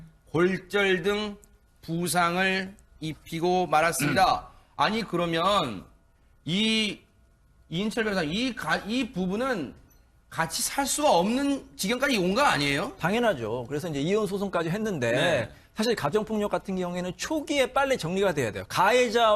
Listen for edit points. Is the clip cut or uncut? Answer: cut